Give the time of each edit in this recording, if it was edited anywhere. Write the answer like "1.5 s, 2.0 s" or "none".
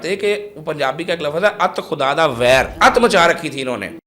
2.7 s